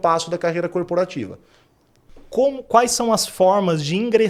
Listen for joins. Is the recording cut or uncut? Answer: uncut